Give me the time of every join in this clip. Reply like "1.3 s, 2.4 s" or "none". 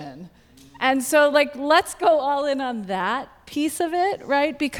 none